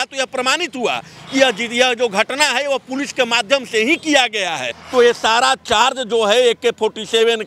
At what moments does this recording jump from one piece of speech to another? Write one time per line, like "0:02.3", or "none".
0:04.7